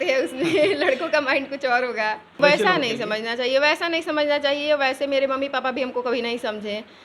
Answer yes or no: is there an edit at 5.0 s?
no